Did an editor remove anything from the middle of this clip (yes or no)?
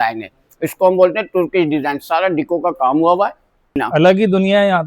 yes